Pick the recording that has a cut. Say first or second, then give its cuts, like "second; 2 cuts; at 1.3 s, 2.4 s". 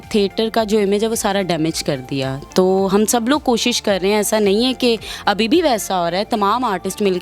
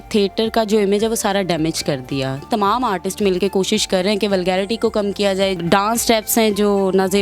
second; 2 cuts; at 2.5 s, 5.6 s